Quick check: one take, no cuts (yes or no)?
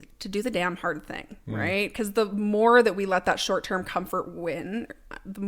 yes